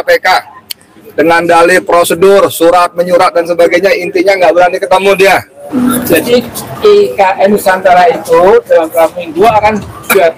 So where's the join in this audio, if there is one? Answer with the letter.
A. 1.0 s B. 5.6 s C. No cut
B